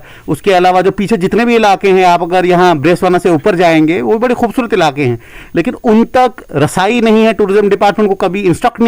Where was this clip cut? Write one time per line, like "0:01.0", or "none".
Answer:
none